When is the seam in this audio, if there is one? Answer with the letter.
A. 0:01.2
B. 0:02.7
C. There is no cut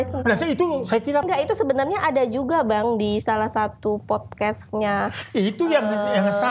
A